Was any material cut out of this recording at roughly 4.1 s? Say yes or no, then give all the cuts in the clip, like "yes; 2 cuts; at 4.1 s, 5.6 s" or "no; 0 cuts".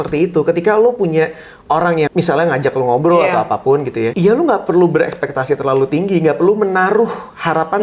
yes; 2 cuts; at 2.1 s, 4.1 s